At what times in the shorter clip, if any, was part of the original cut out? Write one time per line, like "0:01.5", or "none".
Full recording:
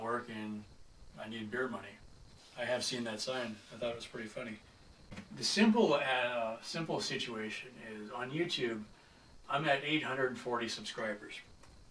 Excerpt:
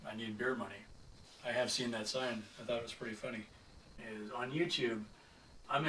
0:03.9